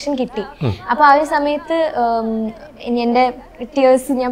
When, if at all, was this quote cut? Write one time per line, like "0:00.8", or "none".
none